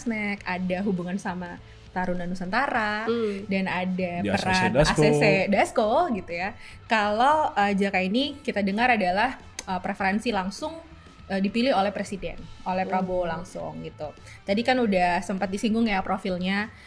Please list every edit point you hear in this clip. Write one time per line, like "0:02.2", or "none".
none

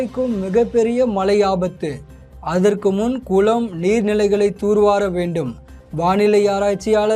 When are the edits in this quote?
none

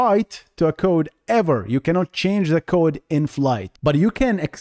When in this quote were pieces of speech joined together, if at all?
0:03.7

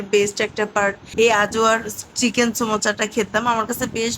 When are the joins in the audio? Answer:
0:01.0

